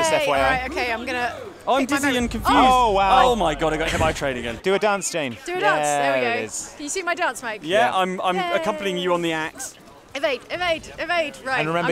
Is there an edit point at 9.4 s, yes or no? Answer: yes